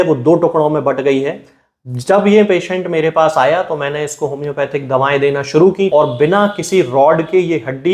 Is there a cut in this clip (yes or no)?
yes